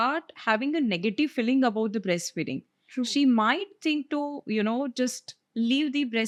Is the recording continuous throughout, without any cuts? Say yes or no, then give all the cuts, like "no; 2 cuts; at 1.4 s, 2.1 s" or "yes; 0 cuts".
yes; 0 cuts